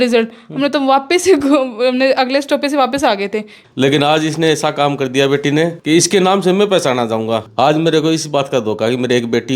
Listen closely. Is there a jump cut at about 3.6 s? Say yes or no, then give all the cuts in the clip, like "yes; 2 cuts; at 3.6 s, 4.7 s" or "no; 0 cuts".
yes; 3 cuts; at 3.6 s, 5.8 s, 7.5 s